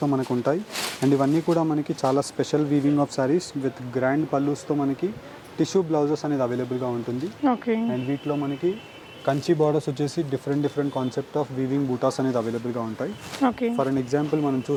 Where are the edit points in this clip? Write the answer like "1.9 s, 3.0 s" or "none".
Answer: none